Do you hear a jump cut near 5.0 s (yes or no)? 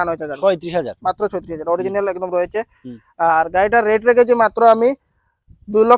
no